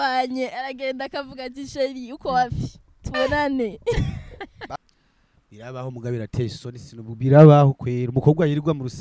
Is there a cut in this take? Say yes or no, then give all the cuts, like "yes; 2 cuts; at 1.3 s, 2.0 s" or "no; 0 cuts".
yes; 1 cut; at 4.7 s